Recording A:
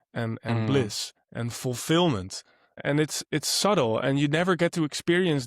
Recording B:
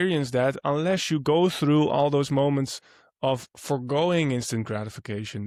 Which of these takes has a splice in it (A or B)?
A